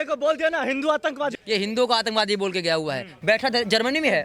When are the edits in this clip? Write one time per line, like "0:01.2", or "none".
0:01.4
0:03.1